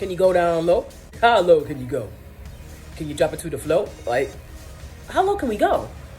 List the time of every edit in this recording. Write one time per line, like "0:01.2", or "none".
0:01.0